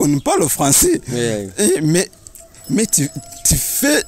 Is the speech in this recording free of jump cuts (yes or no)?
yes